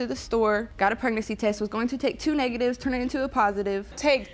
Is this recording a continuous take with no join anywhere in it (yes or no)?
yes